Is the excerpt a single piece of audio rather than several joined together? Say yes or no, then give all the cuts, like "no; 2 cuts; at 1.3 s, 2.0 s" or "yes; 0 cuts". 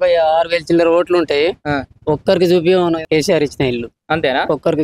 no; 1 cut; at 3.0 s